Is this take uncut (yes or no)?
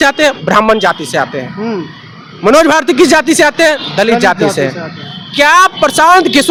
yes